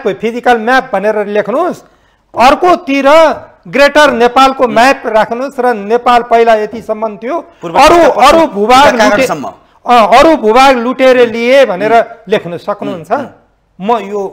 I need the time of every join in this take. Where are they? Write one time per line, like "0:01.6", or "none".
none